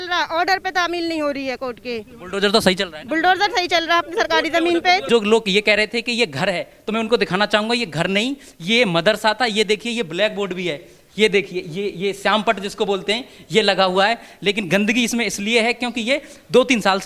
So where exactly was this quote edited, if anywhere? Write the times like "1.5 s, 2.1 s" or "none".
5.1 s